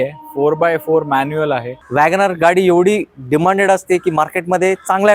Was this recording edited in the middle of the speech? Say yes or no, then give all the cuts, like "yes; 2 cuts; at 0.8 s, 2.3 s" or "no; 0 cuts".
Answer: yes; 1 cut; at 1.7 s